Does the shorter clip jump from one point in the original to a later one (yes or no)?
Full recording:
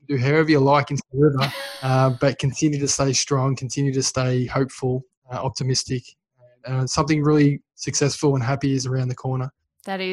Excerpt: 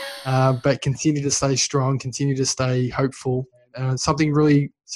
yes